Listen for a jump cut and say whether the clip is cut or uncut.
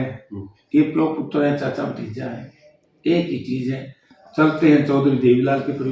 uncut